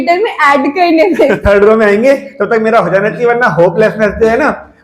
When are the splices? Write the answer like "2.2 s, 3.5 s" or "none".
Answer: 1.4 s